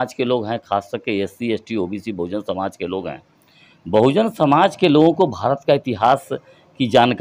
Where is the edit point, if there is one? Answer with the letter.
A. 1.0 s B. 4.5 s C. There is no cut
C